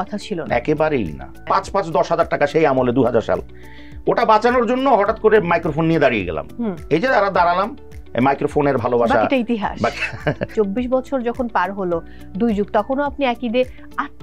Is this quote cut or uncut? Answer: cut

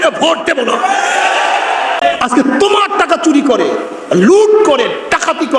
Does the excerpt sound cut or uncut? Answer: cut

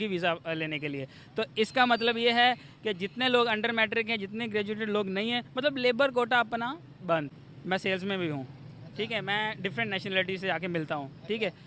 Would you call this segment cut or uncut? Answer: cut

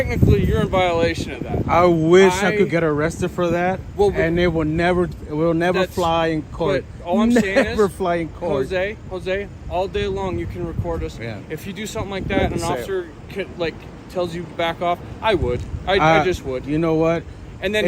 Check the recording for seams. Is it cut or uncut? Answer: uncut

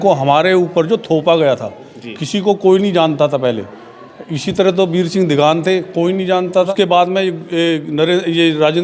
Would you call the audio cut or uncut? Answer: cut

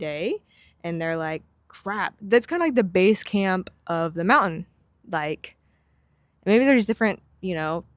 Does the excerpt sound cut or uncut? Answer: uncut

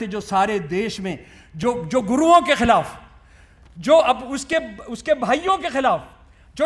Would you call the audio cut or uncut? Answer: uncut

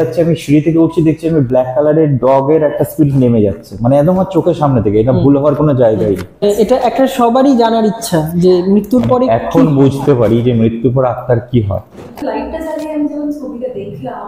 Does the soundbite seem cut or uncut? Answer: cut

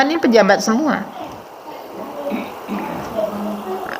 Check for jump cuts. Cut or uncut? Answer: uncut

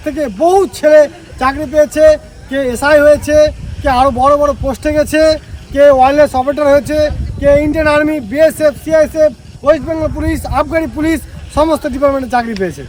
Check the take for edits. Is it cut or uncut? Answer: uncut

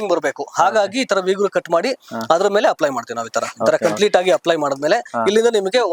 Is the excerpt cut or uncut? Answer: uncut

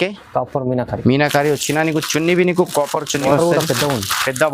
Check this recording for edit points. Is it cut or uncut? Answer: uncut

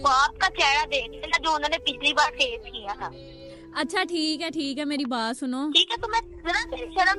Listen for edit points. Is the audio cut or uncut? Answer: uncut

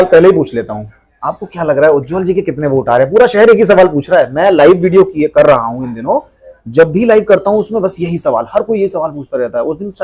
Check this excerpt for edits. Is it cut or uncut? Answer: uncut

